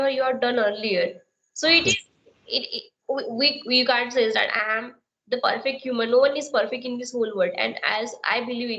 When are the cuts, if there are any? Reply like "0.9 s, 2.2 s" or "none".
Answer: none